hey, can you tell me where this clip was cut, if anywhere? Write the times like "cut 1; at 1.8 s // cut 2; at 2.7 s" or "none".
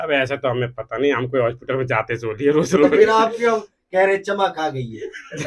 none